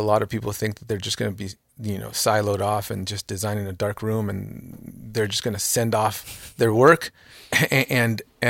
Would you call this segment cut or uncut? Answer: uncut